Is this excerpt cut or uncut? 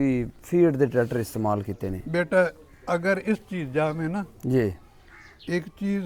uncut